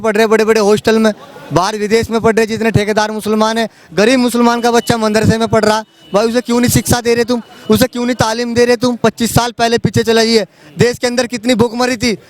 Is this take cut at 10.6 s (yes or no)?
no